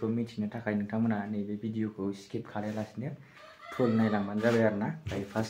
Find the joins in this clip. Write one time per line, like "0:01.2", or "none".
none

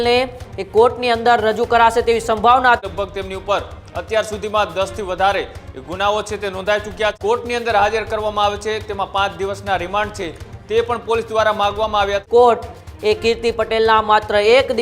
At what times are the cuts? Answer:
0:02.8
0:07.2
0:12.2

